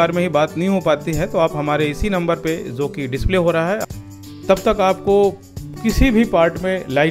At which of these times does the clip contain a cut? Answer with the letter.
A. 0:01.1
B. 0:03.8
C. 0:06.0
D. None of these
B